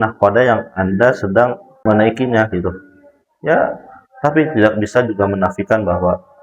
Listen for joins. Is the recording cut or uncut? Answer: cut